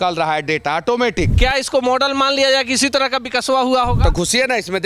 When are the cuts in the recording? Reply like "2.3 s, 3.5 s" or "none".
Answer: 1.3 s